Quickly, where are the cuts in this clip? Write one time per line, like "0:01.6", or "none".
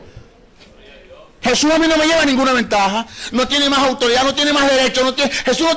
0:03.6